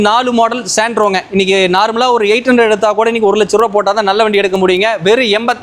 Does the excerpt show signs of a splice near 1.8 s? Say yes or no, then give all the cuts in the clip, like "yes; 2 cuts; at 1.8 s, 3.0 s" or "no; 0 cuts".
no; 0 cuts